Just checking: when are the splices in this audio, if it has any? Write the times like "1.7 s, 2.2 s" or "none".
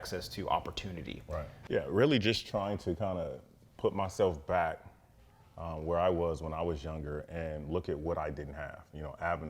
1.5 s